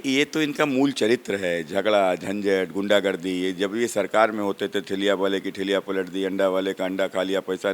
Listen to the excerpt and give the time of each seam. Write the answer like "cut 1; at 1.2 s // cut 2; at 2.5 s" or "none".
none